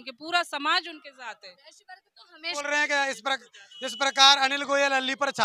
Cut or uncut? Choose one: cut